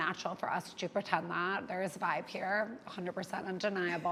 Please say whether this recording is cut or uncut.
uncut